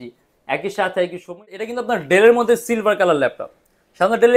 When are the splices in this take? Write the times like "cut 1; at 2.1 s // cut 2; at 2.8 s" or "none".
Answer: cut 1; at 1.7 s